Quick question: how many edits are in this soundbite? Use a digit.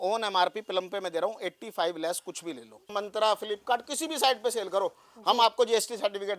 1